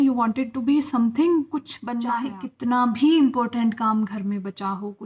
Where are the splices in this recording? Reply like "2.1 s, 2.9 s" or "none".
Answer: 2.1 s